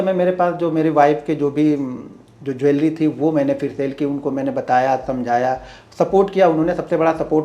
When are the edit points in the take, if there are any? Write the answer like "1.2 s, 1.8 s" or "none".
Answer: none